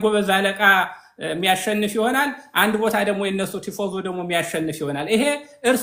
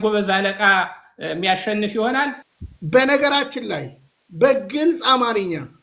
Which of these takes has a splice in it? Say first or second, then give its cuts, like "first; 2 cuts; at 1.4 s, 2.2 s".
second; 1 cut; at 2.4 s